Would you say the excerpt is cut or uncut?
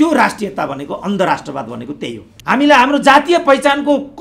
cut